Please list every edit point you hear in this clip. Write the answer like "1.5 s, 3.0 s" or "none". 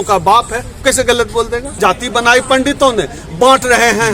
1.7 s